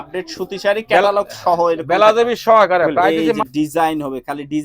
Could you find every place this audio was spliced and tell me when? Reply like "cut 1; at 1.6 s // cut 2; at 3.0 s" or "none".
cut 1; at 3.2 s

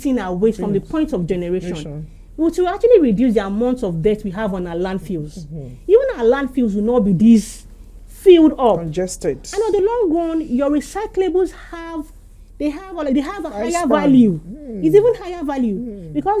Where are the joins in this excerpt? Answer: none

